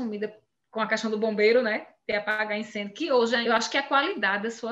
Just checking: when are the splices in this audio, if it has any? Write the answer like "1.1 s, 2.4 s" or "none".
3.4 s